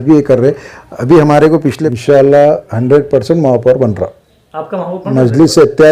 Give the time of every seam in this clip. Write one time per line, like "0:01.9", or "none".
0:01.8